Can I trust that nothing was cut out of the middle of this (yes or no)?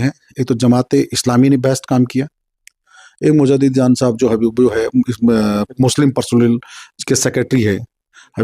yes